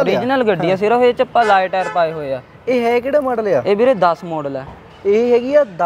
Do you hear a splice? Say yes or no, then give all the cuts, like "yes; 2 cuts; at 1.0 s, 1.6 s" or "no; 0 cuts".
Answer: no; 0 cuts